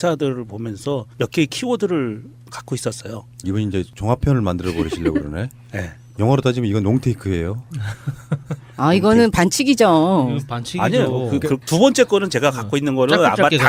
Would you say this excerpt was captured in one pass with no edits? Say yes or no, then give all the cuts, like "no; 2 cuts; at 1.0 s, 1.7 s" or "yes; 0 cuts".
yes; 0 cuts